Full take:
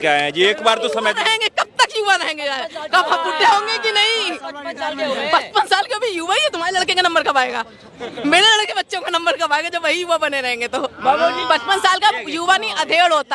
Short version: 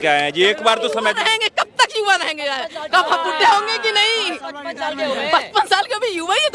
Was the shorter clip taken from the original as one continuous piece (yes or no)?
yes